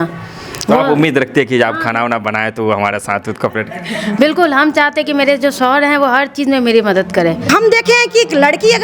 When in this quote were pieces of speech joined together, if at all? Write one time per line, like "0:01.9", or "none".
0:07.4